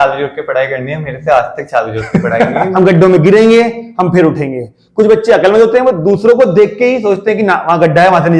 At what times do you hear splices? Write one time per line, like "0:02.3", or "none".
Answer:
0:02.7